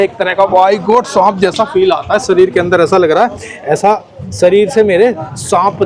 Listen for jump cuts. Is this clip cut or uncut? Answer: uncut